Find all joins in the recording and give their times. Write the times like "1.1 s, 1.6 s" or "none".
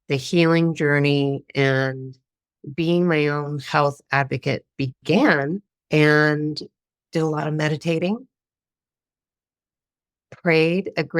5.7 s